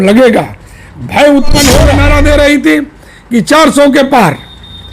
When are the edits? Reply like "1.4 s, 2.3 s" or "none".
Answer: 1.9 s